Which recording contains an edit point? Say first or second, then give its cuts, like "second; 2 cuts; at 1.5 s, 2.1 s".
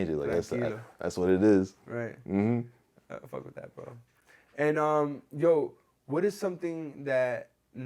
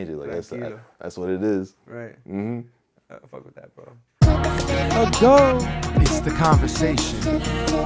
second; 1 cut; at 4.1 s